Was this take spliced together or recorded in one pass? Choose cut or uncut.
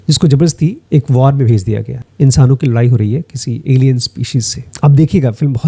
cut